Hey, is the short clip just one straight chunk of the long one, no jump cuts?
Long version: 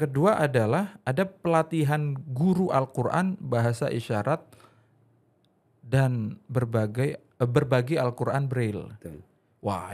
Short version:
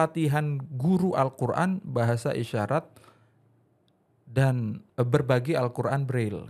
no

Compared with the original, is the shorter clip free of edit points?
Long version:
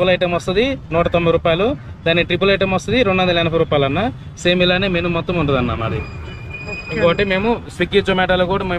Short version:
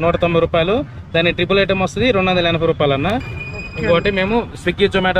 no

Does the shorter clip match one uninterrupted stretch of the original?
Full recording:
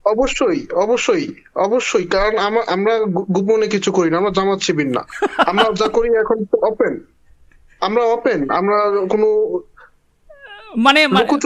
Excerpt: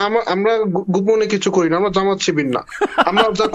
yes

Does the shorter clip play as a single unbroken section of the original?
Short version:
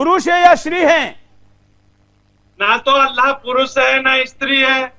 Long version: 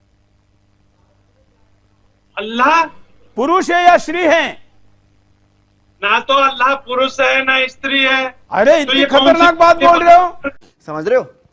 yes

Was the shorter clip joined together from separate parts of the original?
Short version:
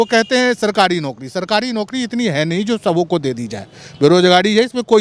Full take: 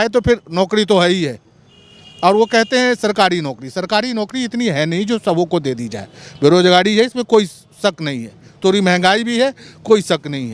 no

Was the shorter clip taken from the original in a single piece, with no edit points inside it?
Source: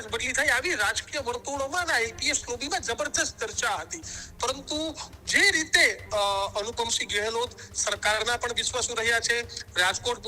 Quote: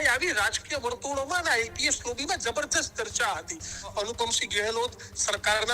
no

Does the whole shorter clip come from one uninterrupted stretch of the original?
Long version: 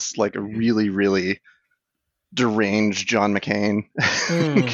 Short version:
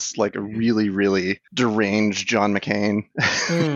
no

